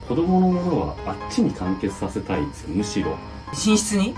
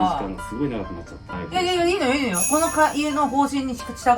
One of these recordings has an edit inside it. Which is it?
second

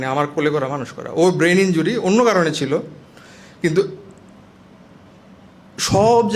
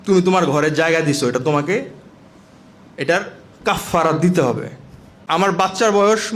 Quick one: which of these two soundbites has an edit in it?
second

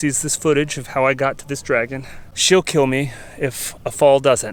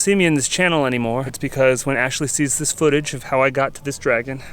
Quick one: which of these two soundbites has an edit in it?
second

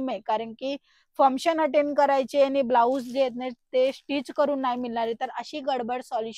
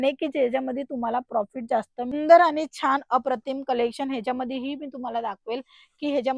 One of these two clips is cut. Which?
second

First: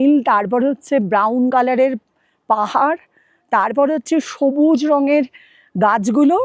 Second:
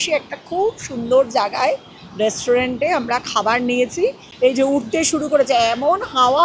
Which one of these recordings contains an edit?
second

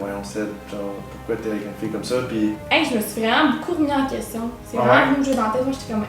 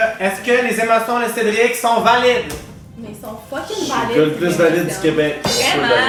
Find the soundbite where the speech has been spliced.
first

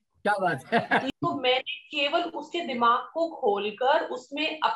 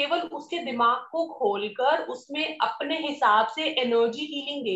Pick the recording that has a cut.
first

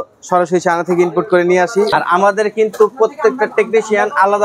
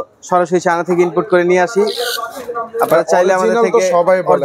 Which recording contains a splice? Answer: first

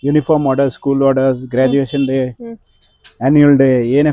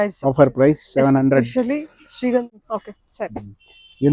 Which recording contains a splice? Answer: second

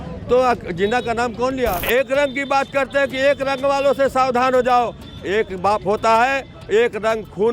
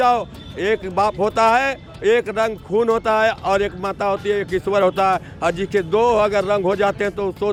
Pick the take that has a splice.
first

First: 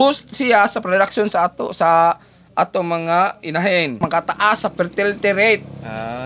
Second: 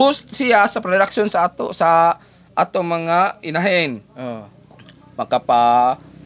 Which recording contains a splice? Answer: first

